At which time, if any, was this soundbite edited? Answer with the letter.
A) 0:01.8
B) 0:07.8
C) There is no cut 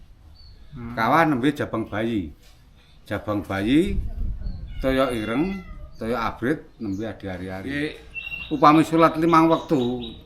B